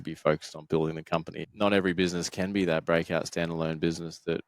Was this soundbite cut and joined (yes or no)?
yes